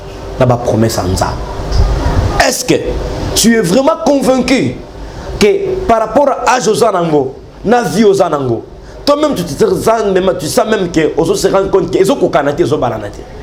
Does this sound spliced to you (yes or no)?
no